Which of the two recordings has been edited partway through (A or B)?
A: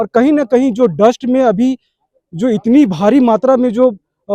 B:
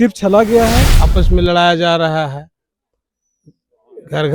B